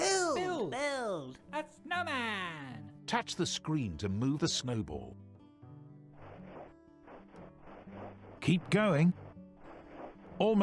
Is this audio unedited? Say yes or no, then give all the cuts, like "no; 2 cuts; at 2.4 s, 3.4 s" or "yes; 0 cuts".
yes; 0 cuts